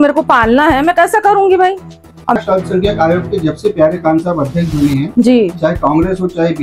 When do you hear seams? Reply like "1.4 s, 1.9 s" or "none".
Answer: 2.4 s